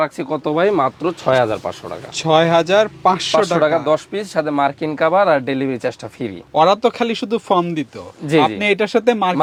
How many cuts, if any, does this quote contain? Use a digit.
0